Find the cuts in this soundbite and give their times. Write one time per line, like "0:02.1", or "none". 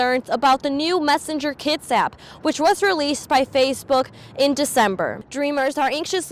0:05.2